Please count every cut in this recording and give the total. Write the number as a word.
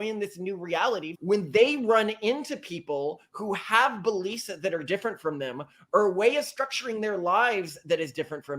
one